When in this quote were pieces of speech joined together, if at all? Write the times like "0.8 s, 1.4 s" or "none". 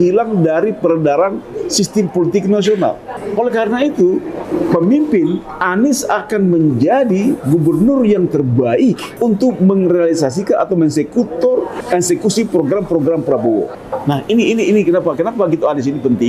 3.2 s, 4.4 s, 9.1 s, 11.8 s, 13.8 s